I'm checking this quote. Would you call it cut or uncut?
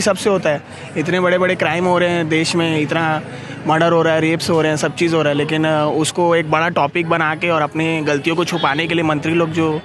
uncut